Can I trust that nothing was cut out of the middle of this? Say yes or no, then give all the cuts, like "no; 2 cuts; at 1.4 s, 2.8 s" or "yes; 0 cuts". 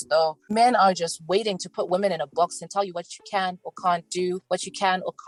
yes; 0 cuts